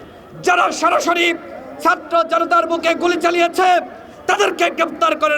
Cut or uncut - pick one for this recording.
uncut